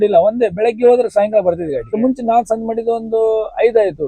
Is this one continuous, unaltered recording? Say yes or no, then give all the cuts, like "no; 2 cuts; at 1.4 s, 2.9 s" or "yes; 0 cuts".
no; 1 cut; at 1.9 s